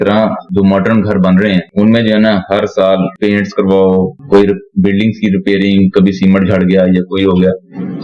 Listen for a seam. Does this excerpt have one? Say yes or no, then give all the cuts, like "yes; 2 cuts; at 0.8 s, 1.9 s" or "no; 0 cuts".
no; 0 cuts